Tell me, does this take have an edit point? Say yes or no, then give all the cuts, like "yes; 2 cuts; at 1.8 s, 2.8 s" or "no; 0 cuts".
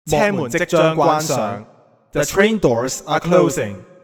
no; 0 cuts